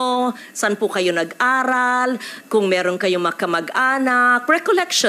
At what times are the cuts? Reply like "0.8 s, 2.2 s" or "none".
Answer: none